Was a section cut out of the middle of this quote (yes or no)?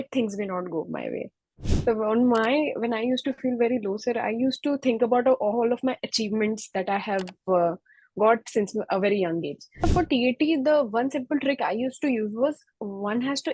yes